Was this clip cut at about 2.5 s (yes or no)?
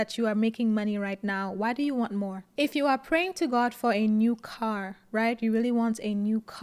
no